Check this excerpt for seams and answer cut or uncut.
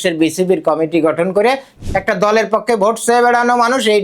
cut